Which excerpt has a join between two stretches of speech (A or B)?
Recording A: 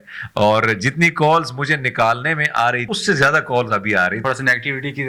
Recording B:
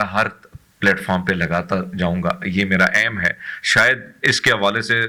A